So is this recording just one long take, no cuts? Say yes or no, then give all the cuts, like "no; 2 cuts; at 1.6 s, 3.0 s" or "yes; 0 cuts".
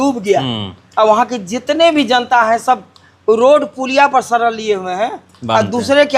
yes; 0 cuts